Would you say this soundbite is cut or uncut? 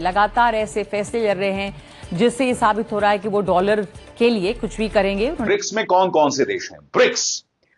cut